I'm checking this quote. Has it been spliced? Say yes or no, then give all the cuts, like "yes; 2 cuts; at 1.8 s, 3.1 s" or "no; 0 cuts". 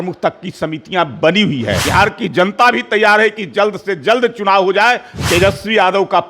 yes; 2 cuts; at 1.8 s, 5.1 s